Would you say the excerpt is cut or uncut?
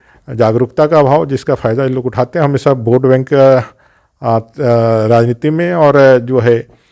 uncut